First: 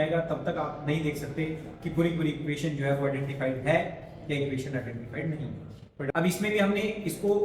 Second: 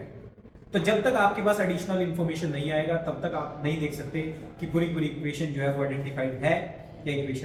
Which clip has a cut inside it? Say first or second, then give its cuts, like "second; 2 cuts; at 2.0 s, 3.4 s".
first; 1 cut; at 6.1 s